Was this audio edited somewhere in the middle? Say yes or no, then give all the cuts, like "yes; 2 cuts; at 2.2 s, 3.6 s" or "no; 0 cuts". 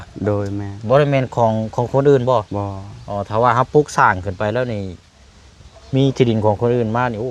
no; 0 cuts